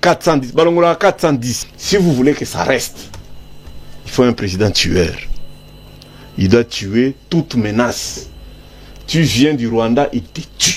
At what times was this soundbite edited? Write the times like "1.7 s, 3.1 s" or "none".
1.6 s